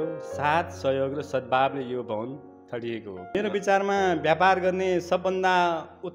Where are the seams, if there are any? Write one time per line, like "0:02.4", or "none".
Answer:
0:03.3